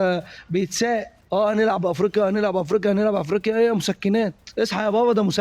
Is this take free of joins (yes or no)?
no